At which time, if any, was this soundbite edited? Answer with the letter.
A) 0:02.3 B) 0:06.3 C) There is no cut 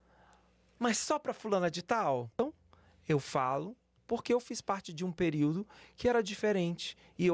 A